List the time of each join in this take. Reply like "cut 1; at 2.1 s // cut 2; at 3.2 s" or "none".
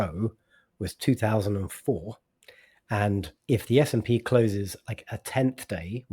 cut 1; at 3.3 s

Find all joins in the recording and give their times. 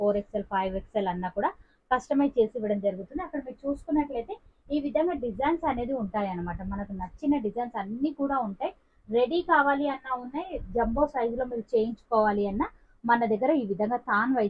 none

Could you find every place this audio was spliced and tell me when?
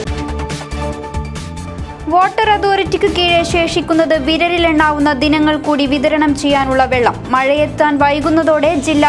cut 1; at 1.0 s

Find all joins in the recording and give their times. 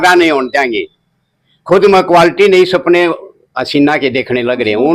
none

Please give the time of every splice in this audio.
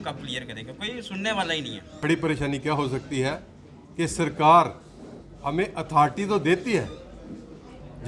cut 1; at 1.8 s

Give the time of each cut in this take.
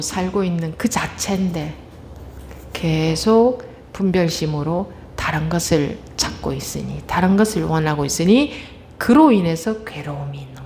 none

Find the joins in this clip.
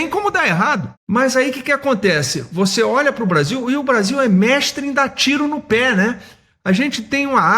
cut 1; at 0.9 s

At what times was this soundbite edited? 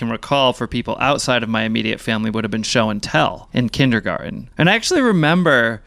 cut 1; at 3.4 s // cut 2; at 4.4 s

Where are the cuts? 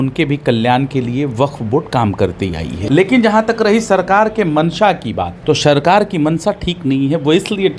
cut 1; at 2.8 s // cut 2; at 5.3 s

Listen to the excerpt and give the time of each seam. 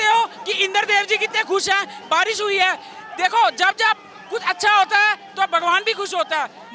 none

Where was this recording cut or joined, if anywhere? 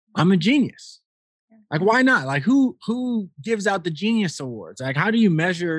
none

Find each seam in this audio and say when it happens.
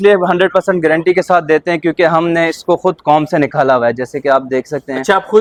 none

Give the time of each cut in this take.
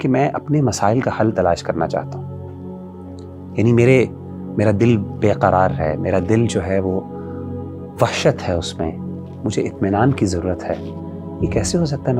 none

